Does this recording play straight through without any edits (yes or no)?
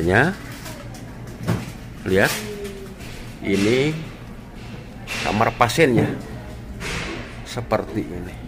yes